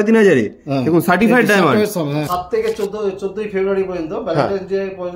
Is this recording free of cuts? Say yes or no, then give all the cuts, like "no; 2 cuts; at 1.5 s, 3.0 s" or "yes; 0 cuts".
no; 1 cut; at 2.3 s